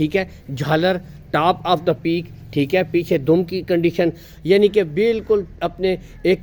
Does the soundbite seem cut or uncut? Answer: uncut